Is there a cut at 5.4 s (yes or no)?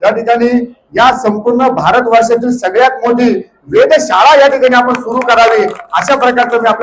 no